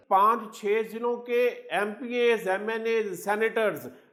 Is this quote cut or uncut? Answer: uncut